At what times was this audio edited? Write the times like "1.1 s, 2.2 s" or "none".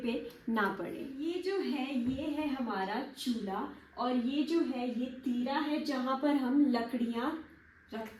none

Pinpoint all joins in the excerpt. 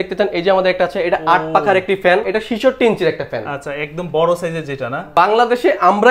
2.3 s, 5.1 s

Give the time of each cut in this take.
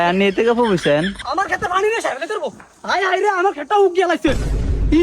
1.1 s

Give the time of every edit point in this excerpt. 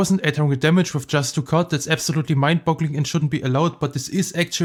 none

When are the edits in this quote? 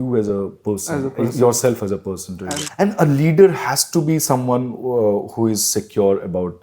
2.5 s

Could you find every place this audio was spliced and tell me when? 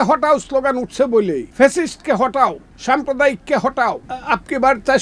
1.5 s, 2.7 s, 4.1 s

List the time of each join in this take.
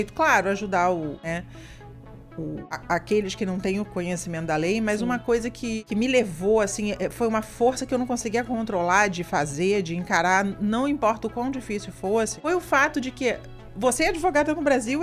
1.2 s, 2.7 s, 5.8 s, 12.4 s

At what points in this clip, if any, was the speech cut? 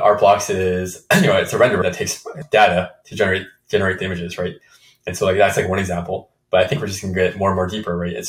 1.8 s

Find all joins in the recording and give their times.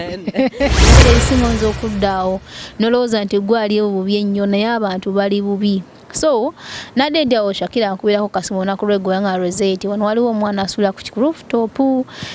1.0 s

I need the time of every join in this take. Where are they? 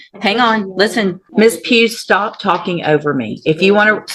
1.2 s

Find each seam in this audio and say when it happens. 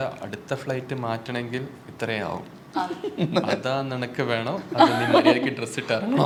none

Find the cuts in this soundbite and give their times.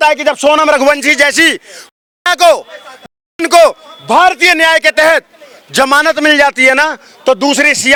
none

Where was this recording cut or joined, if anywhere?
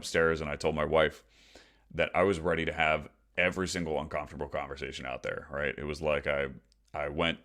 none

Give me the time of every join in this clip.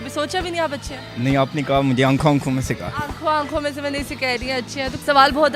none

